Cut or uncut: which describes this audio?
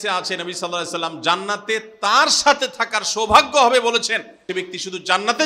cut